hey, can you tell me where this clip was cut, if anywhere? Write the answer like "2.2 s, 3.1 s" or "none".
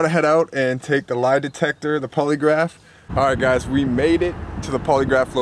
3.0 s